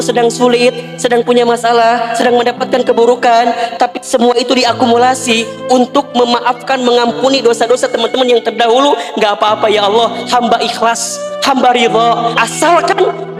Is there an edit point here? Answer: no; 0 cuts

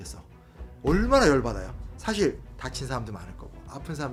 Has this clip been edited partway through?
no; 0 cuts

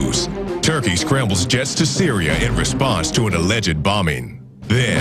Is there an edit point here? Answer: no; 0 cuts

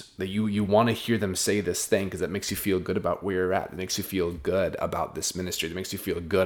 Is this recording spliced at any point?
no; 0 cuts

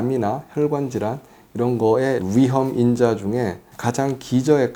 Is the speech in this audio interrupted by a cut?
no; 0 cuts

